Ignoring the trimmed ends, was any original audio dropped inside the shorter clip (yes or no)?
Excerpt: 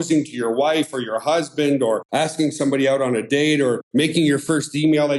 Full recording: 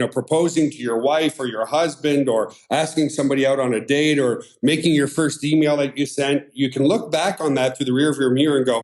yes